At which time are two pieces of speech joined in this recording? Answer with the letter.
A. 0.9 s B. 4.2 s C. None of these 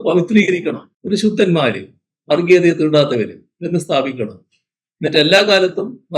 A